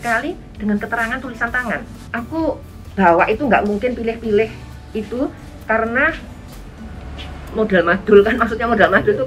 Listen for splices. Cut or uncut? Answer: cut